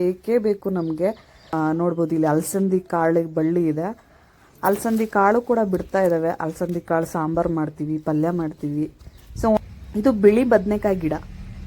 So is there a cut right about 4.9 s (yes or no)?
no